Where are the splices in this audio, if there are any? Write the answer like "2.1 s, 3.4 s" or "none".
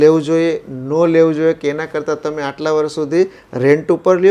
none